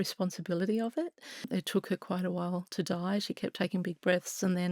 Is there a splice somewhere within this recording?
yes; 1 cut; at 1.4 s

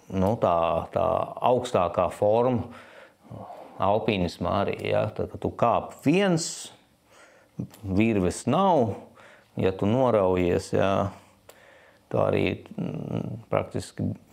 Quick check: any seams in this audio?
no; 0 cuts

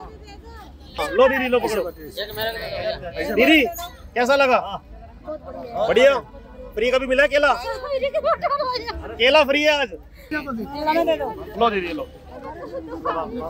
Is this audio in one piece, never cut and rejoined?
no; 1 cut; at 1.0 s

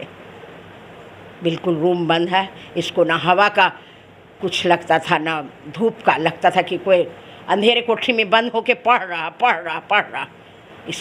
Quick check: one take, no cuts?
yes; 0 cuts

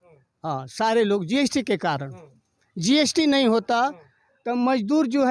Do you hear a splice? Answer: no; 0 cuts

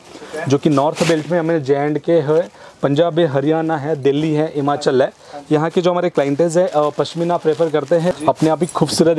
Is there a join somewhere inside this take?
yes; 1 cut; at 8.2 s

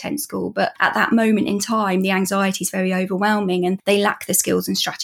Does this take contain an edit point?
yes; 1 cut; at 3.8 s

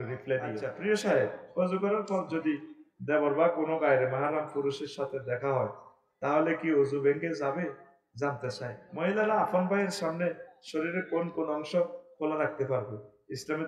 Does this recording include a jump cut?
yes; 2 cuts; at 0.8 s, 8.8 s

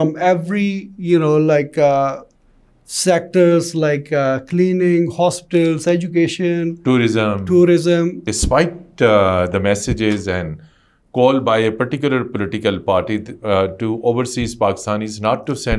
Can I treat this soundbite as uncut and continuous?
no; 1 cut; at 8.2 s

